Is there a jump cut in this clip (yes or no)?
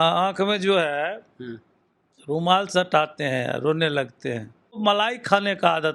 yes